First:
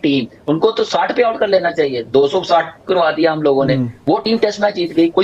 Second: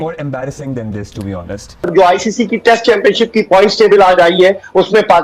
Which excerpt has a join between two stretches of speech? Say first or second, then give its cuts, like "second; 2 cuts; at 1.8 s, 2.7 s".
second; 1 cut; at 1.8 s